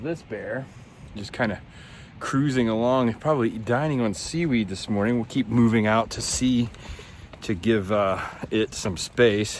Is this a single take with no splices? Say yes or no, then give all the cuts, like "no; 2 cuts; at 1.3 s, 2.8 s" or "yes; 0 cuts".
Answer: yes; 0 cuts